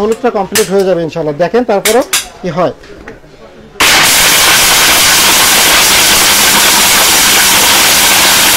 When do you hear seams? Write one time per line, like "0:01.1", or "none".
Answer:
none